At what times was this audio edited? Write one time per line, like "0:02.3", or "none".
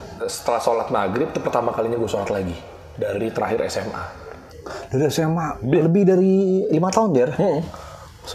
none